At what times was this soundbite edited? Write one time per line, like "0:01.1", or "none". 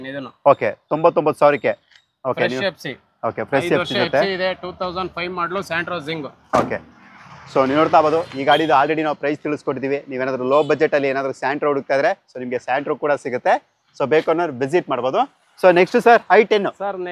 none